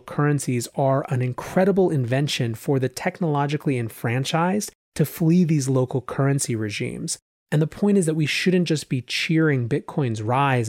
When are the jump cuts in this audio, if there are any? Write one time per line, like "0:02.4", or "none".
0:07.2